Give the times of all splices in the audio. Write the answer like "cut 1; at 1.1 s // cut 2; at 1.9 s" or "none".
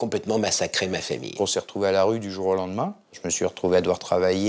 cut 1; at 1.3 s // cut 2; at 3.2 s